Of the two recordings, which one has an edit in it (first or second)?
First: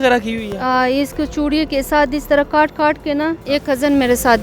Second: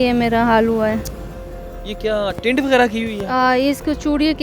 first